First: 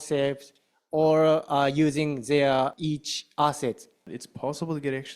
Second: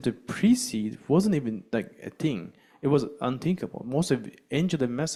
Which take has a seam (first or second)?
first